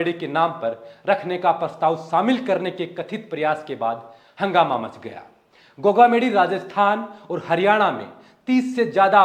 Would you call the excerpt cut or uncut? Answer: uncut